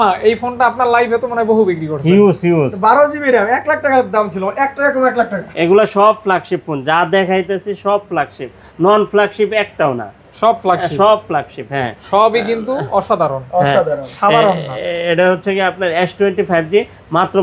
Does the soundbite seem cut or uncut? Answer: uncut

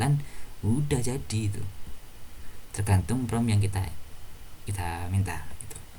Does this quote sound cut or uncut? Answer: uncut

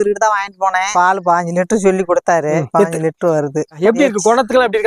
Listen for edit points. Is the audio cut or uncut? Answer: uncut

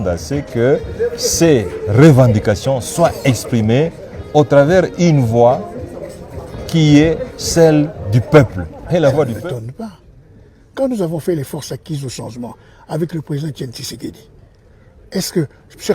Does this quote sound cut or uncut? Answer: cut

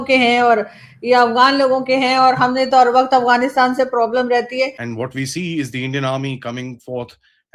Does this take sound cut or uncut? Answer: cut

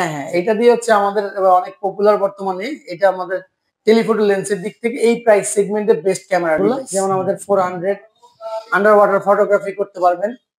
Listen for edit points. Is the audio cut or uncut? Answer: cut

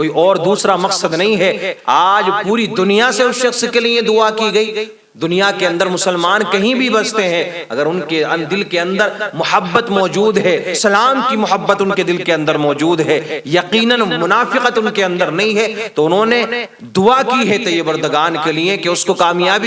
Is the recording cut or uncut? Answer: cut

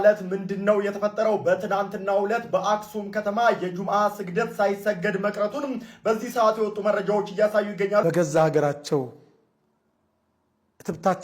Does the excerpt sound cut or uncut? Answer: cut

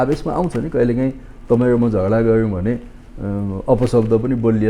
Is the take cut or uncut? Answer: uncut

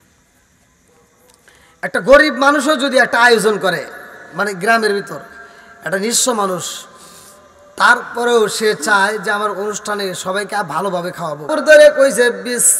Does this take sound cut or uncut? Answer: cut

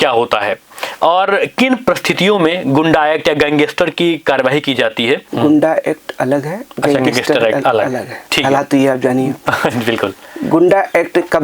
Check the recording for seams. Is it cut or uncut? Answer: cut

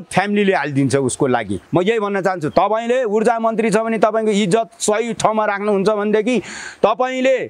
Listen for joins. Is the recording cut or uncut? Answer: cut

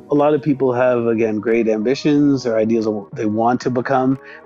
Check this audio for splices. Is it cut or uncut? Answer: uncut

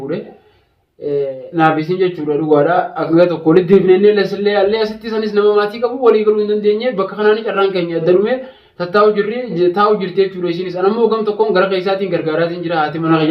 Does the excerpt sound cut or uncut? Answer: cut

